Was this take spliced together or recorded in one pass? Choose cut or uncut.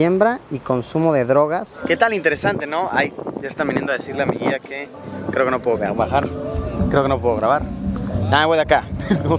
cut